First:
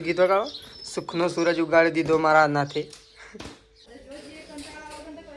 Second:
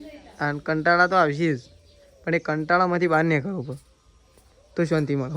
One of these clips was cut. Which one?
first; 1 cut; at 3.9 s

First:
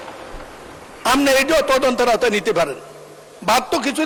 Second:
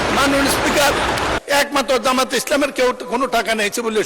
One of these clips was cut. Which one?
second; 1 cut; at 1.4 s

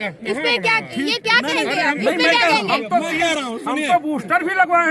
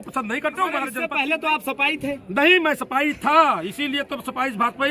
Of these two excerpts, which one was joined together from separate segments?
second; 1 cut; at 1.0 s

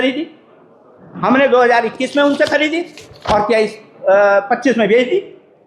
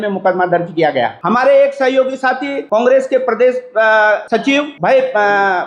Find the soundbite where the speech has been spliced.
second; 3 cuts; at 1.2 s, 2.5 s, 4.3 s

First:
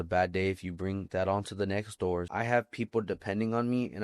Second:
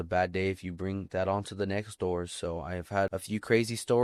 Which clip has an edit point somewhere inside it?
first; 1 cut; at 2.3 s

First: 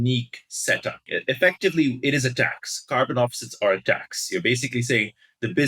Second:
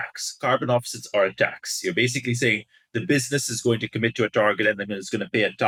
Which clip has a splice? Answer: first; 1 cut; at 1.1 s

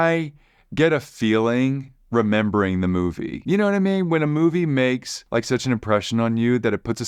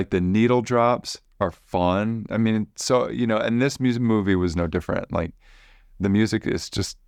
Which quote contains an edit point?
first; 2 cuts; at 3.3 s, 5.1 s

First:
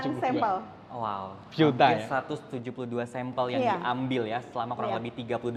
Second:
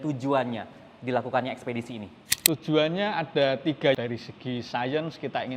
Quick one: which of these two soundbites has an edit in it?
second; 1 cut; at 4.0 s

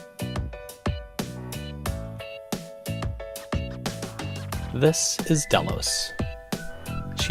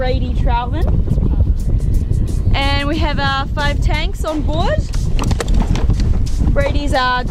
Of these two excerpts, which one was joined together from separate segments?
first; 1 cut; at 4.8 s

